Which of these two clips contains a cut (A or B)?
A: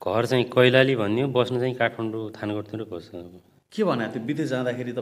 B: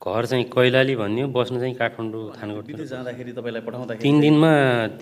B